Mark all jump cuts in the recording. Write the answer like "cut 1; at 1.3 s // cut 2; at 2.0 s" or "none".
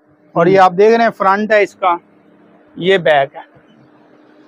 none

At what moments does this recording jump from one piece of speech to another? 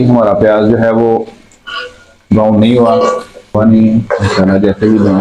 cut 1; at 3.6 s

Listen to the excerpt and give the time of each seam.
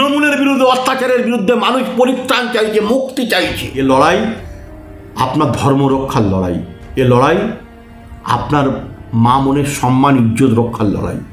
cut 1; at 3.6 s

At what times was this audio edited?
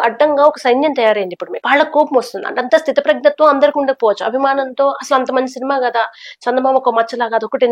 cut 1; at 1.5 s

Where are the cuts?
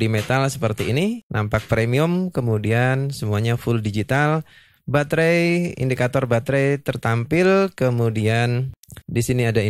none

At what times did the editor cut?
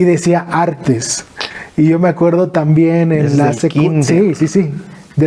none

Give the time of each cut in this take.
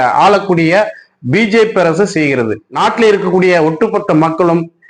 cut 1; at 2.6 s

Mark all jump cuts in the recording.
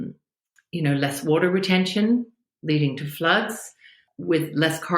cut 1; at 4.0 s

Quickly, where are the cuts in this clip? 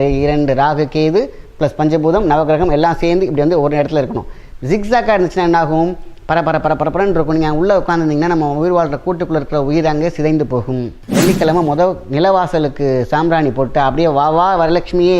cut 1; at 11.0 s

